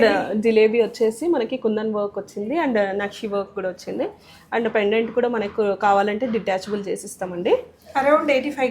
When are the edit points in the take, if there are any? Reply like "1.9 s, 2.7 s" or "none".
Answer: none